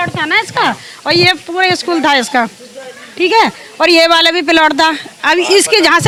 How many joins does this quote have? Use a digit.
0